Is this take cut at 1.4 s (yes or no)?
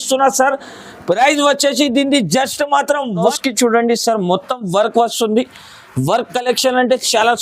no